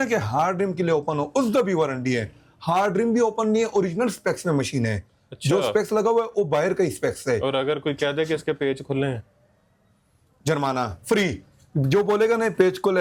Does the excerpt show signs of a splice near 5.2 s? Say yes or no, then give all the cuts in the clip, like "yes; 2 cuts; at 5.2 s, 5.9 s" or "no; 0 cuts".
no; 0 cuts